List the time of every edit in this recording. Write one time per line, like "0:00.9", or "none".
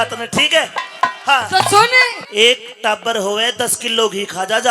0:02.2